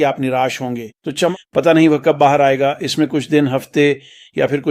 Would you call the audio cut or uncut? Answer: cut